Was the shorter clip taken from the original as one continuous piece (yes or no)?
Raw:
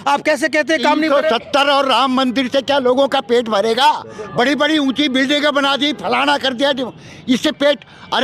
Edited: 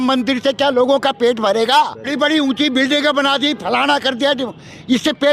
no